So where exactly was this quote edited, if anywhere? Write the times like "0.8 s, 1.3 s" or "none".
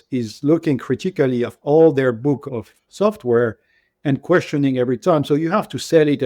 2.4 s